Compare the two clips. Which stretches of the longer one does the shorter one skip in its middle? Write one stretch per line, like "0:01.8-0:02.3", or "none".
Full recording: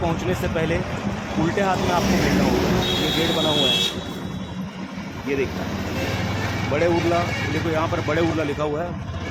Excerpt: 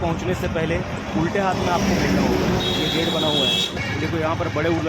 0:01.0-0:01.2
0:04.0-0:07.3